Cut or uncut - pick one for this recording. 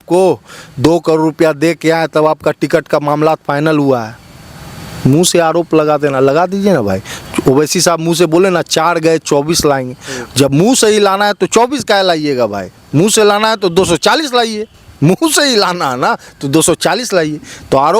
uncut